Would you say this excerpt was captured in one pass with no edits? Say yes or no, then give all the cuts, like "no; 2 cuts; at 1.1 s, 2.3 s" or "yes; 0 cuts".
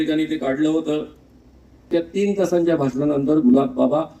no; 1 cut; at 1.9 s